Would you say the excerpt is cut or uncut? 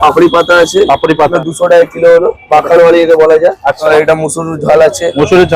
cut